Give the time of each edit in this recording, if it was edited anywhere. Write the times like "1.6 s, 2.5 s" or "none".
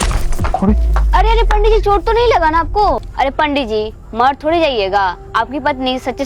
3.1 s

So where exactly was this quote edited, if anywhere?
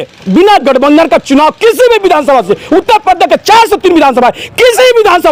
none

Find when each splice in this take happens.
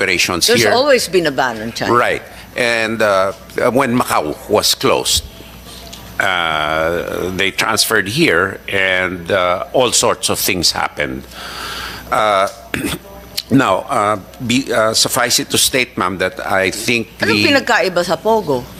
none

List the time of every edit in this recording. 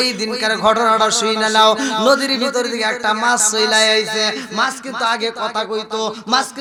none

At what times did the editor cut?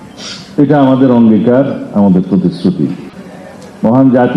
3.1 s

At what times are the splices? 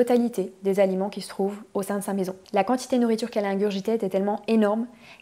2.4 s

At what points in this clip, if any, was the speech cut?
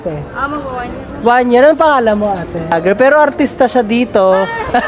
2.8 s

